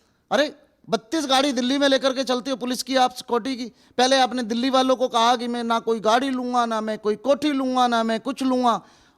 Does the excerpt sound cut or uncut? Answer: uncut